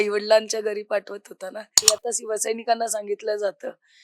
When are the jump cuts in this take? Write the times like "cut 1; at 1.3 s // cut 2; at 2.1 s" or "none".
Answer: cut 1; at 1.9 s